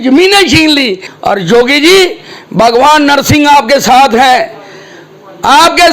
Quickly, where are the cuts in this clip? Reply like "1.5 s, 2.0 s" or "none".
1.0 s